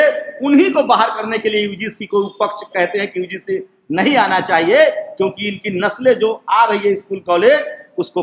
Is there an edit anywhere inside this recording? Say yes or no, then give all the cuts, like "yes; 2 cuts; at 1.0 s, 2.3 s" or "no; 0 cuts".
no; 0 cuts